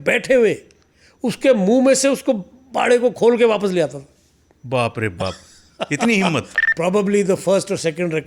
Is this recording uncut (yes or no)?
no